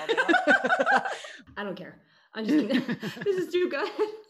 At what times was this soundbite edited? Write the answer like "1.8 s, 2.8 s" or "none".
1.3 s